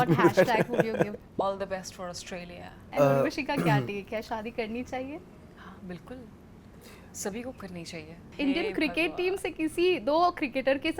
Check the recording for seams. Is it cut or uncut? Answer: cut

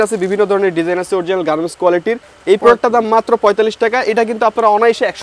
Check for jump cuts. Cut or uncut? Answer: cut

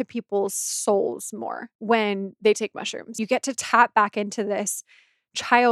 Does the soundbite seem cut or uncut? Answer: cut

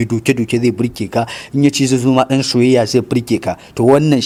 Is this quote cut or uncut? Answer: uncut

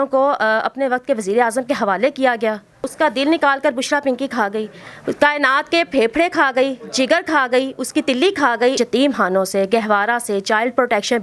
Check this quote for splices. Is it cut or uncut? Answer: cut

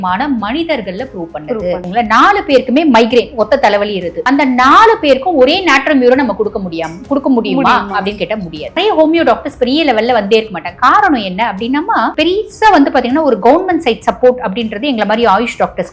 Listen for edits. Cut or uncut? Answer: cut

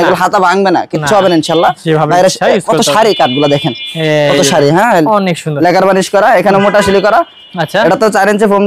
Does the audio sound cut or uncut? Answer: uncut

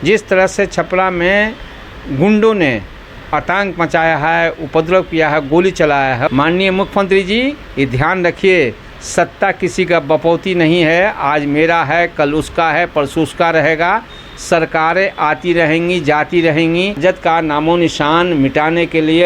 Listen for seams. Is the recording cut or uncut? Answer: cut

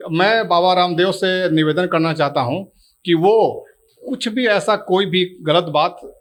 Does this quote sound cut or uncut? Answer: uncut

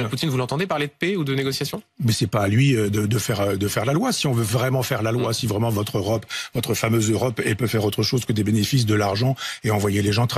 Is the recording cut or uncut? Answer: uncut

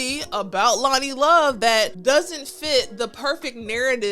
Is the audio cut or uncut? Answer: cut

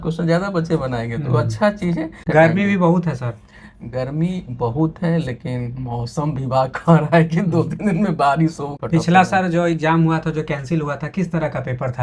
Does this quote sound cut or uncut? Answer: cut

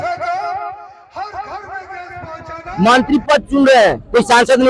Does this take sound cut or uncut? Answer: cut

